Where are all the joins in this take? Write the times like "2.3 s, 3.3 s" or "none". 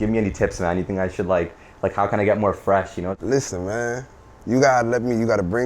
3.2 s